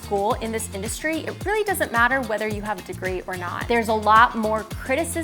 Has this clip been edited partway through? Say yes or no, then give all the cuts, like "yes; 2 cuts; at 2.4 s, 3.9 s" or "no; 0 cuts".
yes; 1 cut; at 3.5 s